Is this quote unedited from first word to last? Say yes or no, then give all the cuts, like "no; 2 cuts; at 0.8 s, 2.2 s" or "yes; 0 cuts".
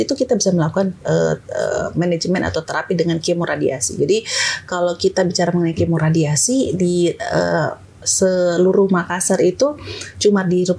yes; 0 cuts